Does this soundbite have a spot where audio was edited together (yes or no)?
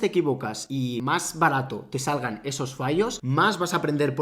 yes